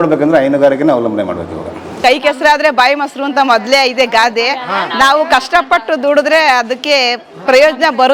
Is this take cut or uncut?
cut